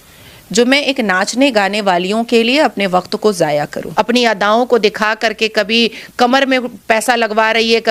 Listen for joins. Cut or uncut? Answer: cut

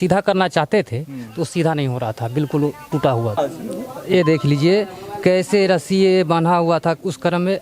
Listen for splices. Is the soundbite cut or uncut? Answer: cut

